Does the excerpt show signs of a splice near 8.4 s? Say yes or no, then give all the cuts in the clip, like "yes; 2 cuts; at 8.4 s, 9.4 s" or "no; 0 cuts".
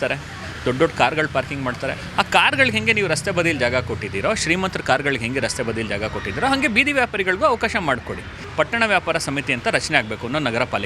yes; 1 cut; at 8.4 s